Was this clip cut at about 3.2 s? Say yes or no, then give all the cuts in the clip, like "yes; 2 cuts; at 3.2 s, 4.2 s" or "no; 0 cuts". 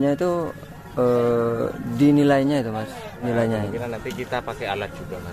yes; 1 cut; at 3.2 s